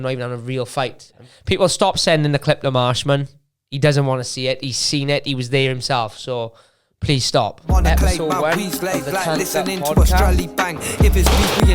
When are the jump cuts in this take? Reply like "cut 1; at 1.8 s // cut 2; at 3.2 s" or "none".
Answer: cut 1; at 1.3 s // cut 2; at 7.6 s